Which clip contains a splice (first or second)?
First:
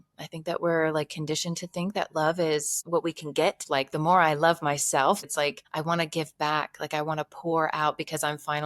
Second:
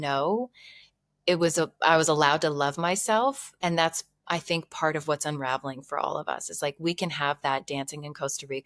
first